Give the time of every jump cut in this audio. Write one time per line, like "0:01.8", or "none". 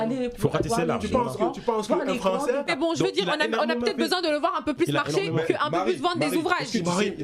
0:02.6